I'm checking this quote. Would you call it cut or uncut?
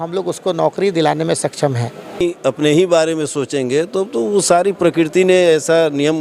cut